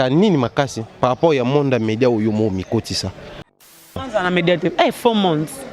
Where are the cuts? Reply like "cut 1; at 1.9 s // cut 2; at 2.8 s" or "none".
cut 1; at 3.9 s